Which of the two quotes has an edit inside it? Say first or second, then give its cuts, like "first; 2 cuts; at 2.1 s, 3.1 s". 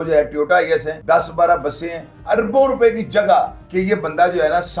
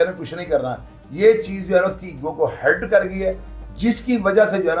first; 3 cuts; at 0.9 s, 2.2 s, 3.6 s